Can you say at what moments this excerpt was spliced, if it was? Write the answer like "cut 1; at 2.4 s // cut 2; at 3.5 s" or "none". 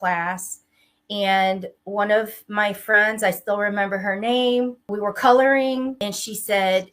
cut 1; at 4.9 s // cut 2; at 6.0 s

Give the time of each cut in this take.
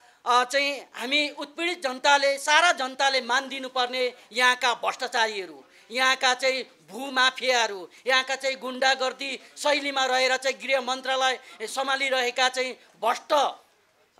none

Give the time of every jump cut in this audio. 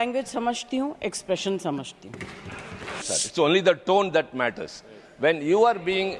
cut 1; at 3.1 s

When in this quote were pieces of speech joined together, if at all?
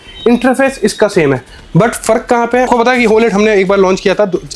cut 1; at 2.7 s

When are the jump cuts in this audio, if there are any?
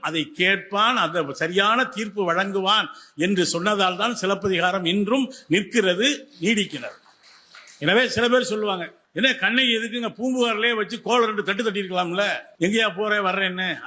cut 1; at 9.0 s // cut 2; at 12.4 s

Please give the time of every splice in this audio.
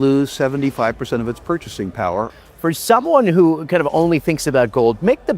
cut 1; at 2.3 s

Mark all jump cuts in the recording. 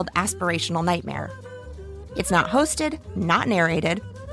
cut 1; at 1.1 s

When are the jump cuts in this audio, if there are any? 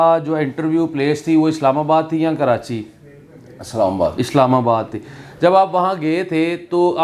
none

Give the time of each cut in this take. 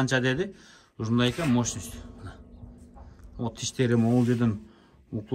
none

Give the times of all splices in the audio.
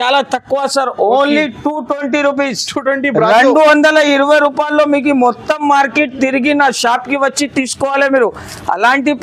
none

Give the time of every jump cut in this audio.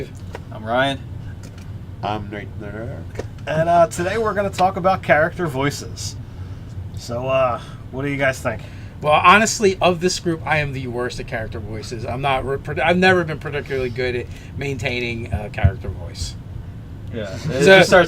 cut 1; at 3.9 s

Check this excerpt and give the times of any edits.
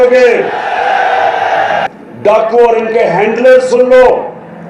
cut 1; at 1.9 s

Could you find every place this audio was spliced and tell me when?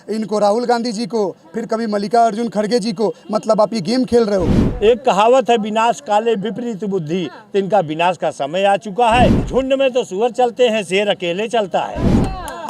cut 1; at 4.6 s // cut 2; at 9.4 s

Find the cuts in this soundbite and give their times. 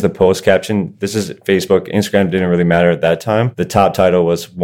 cut 1; at 3.6 s

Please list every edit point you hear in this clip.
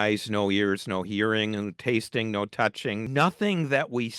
cut 1; at 3.0 s

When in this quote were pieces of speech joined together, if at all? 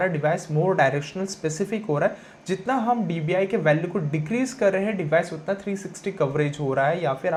none

